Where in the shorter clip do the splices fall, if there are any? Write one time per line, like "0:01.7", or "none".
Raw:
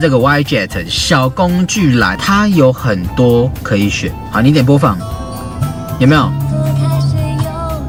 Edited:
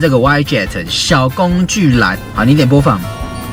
0:02.2